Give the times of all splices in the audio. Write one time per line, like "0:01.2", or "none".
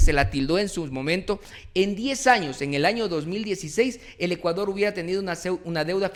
none